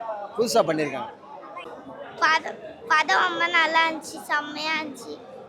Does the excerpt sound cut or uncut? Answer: cut